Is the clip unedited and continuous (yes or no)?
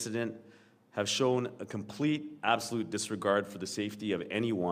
yes